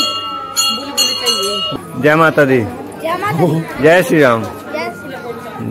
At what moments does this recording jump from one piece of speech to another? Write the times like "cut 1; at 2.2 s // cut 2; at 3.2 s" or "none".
cut 1; at 1.8 s